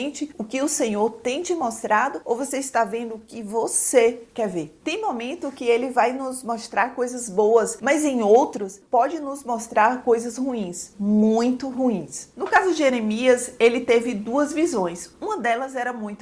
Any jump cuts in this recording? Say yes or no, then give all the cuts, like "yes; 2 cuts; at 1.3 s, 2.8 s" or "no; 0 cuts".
no; 0 cuts